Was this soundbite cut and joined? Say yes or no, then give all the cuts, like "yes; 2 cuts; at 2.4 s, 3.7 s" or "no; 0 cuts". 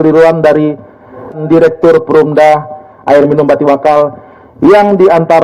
yes; 1 cut; at 1.4 s